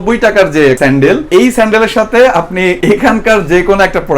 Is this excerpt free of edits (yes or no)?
no